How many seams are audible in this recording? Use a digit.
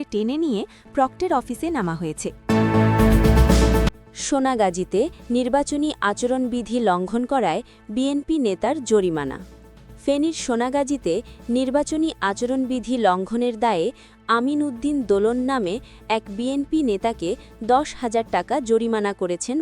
2